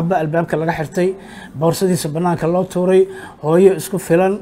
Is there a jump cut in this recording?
no; 0 cuts

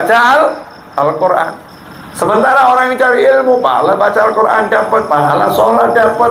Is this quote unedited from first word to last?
yes; 0 cuts

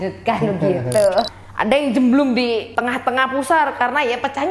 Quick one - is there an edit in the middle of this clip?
yes; 2 cuts; at 1.4 s, 2.7 s

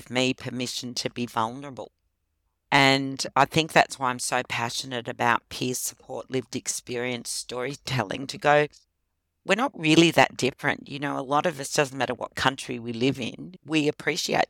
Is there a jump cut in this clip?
yes; 1 cut; at 13.5 s

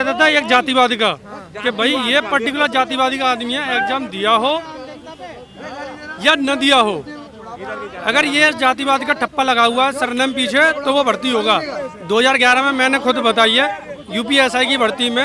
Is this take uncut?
yes; 0 cuts

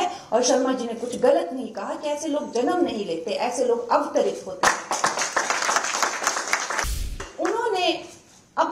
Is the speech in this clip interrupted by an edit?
yes; 1 cut; at 7.2 s

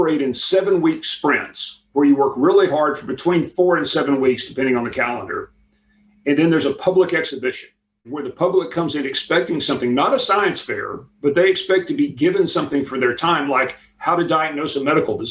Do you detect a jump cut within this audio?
yes; 1 cut; at 8.0 s

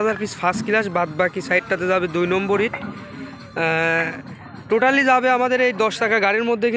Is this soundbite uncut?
yes; 0 cuts

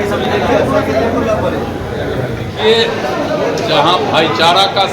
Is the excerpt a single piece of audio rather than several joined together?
no; 1 cut; at 2.5 s

